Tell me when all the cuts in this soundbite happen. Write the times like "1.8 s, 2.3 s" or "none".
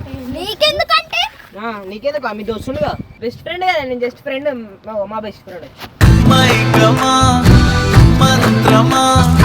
3.1 s